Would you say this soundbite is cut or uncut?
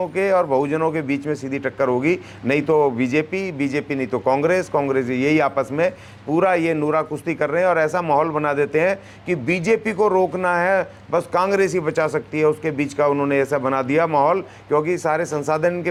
uncut